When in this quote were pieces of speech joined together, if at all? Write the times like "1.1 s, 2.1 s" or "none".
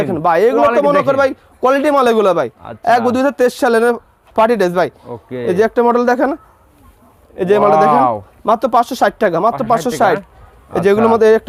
none